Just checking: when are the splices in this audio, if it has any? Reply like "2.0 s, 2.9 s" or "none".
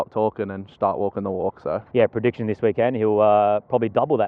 1.9 s